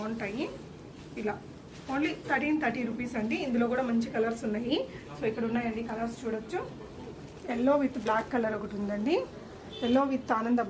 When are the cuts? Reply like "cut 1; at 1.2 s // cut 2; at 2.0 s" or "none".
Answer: none

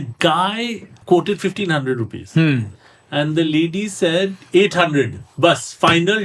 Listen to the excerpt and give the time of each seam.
cut 1; at 0.9 s

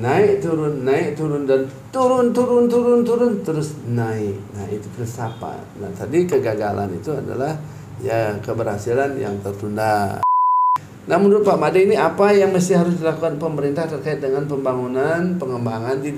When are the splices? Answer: cut 1; at 10.5 s

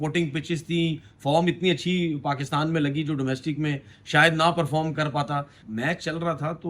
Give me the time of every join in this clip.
cut 1; at 5.6 s

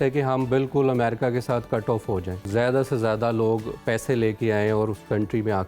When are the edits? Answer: cut 1; at 2.5 s

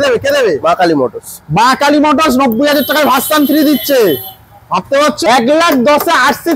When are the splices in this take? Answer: cut 1; at 5.3 s

